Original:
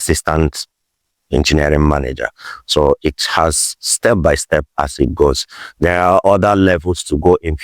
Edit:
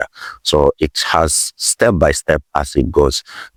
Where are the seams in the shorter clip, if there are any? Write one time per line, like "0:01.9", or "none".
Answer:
none